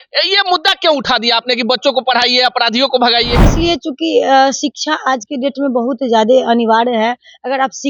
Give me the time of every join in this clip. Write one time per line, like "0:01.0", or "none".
0:03.4